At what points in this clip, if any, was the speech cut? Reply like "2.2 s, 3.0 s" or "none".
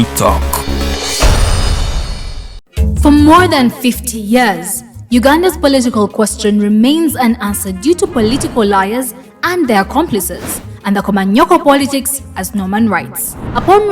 2.7 s